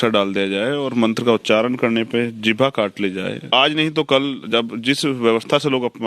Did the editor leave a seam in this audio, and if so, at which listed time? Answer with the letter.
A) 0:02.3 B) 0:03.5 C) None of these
B